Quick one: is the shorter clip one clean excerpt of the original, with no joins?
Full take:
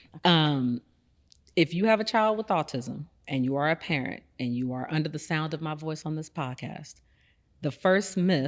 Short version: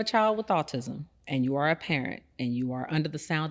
yes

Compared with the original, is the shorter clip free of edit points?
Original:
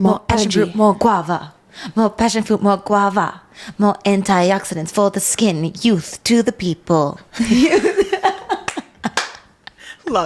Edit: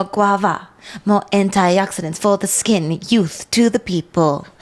yes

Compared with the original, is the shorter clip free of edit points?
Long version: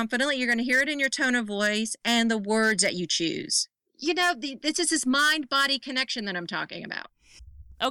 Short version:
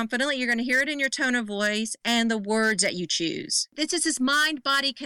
no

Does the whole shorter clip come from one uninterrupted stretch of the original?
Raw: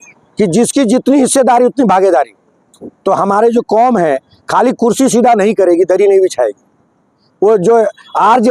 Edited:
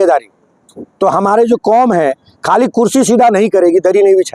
yes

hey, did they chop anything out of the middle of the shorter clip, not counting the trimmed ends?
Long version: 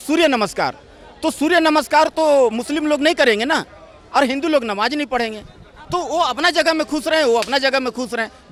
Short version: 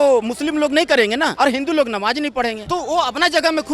yes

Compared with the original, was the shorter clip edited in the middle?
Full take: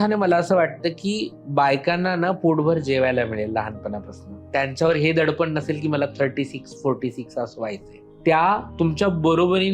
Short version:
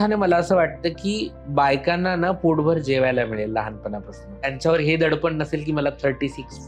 yes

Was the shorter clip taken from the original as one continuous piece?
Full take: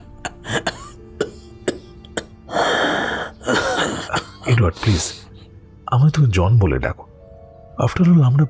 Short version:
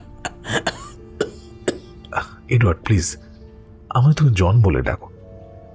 no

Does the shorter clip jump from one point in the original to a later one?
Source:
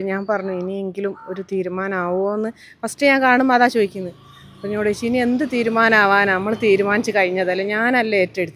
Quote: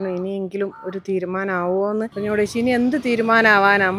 yes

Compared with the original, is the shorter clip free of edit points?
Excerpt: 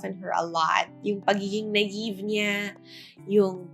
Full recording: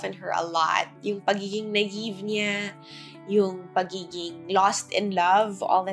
yes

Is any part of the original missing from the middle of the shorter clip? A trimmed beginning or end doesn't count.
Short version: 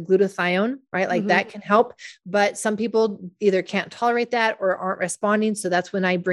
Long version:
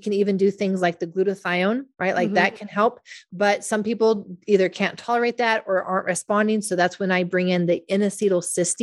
no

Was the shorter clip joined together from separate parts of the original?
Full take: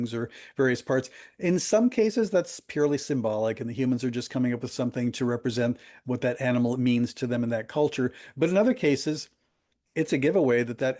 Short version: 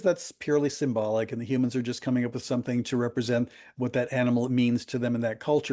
no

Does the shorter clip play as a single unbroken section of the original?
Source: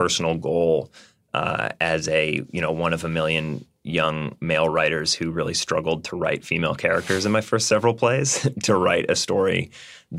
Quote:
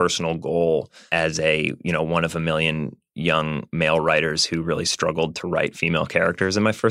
no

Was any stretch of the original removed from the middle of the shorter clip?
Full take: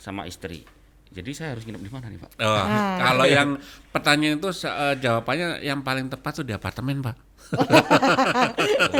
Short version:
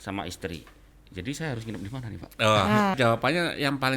yes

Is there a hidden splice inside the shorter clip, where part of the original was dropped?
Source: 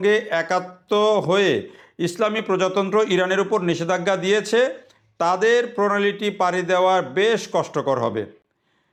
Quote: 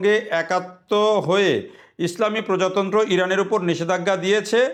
no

